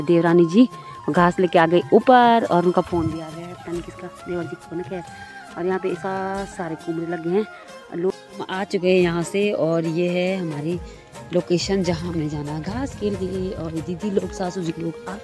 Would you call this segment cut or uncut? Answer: cut